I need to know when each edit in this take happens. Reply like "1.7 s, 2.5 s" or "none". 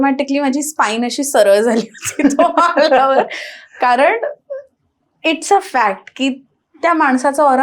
none